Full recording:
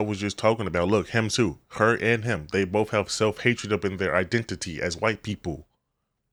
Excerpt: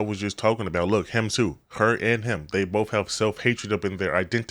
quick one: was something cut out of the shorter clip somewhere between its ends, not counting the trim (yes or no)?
no